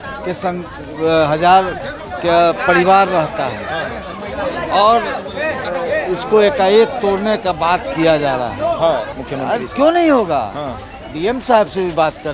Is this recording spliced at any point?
yes; 1 cut; at 9.2 s

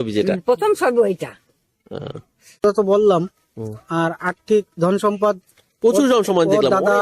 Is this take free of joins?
no; 1 cut; at 2.6 s

